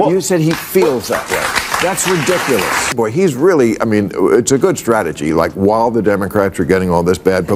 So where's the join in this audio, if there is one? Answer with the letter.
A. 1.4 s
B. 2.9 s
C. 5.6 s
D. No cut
B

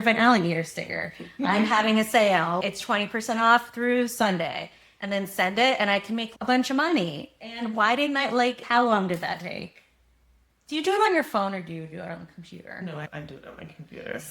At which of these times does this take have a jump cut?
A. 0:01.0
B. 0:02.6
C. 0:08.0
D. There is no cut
B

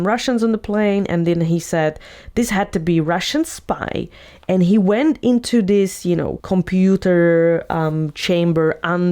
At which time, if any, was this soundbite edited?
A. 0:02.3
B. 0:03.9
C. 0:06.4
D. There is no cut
C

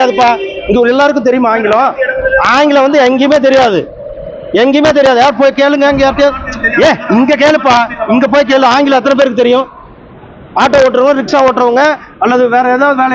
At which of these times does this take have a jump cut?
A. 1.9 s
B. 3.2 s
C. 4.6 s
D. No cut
D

